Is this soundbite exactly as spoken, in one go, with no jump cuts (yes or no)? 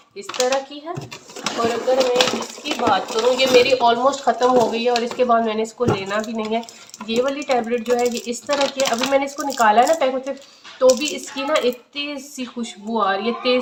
yes